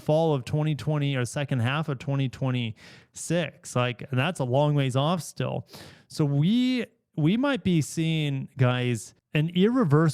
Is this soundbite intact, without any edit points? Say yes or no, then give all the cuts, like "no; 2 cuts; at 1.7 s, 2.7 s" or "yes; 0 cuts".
yes; 0 cuts